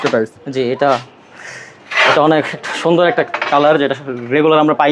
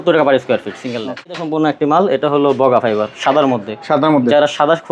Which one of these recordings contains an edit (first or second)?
second